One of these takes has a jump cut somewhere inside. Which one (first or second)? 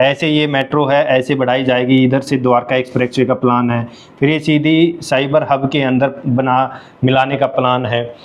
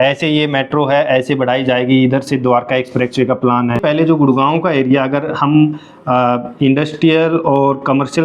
second